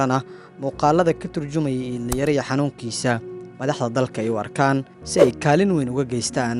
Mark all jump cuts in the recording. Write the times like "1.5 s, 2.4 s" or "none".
none